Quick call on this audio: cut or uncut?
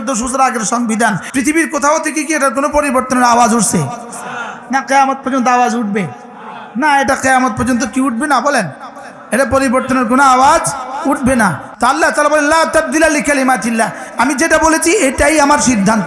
cut